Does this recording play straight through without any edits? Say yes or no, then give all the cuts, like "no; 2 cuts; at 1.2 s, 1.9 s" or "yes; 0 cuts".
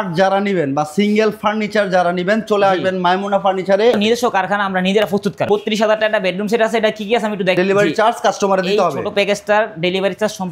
no; 3 cuts; at 3.9 s, 5.5 s, 7.6 s